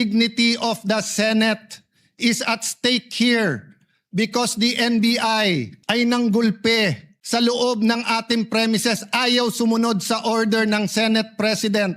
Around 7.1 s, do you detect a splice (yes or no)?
yes